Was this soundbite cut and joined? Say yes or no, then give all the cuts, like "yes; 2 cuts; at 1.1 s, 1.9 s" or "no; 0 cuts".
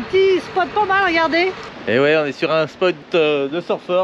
yes; 2 cuts; at 1.7 s, 3.0 s